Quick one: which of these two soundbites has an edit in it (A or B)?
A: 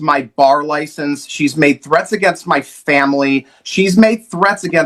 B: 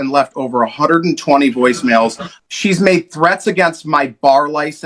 B